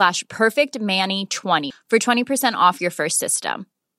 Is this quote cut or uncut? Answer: cut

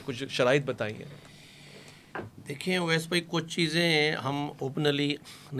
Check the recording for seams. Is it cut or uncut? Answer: uncut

